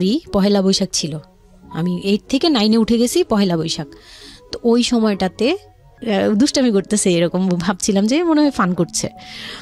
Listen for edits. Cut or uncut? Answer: cut